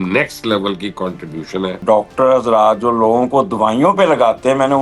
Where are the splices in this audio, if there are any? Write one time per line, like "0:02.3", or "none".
0:01.8